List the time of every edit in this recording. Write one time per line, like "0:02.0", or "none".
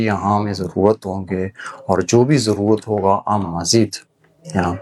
none